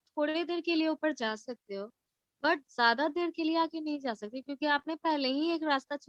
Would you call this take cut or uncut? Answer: uncut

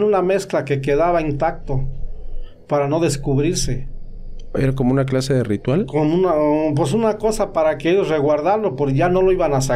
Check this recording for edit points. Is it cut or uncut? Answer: uncut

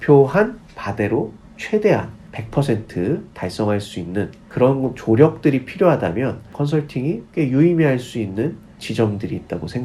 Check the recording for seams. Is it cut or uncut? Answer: uncut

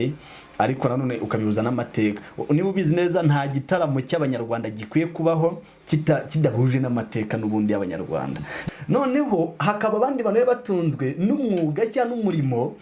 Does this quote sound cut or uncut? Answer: cut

